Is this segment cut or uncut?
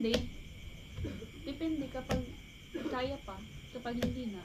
uncut